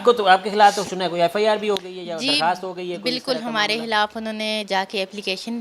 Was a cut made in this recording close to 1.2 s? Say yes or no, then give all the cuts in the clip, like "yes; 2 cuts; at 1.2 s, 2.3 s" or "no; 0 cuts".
no; 0 cuts